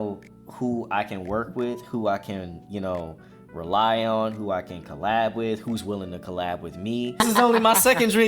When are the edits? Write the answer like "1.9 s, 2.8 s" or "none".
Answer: 7.2 s